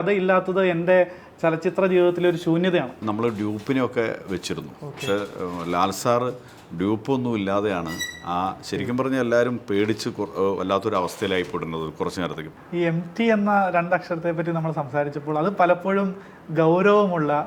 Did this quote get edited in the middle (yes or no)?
yes